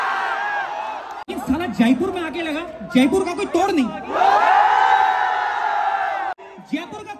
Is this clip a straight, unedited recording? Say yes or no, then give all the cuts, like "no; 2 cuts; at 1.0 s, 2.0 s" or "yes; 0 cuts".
no; 2 cuts; at 1.3 s, 6.3 s